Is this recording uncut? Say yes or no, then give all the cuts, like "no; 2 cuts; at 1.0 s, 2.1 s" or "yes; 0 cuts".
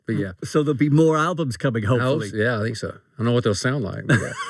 yes; 0 cuts